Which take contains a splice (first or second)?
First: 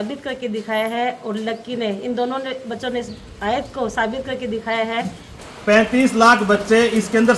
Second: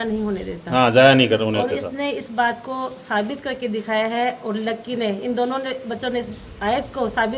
first